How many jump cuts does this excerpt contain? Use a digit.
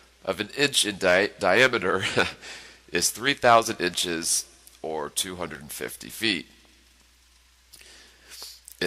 1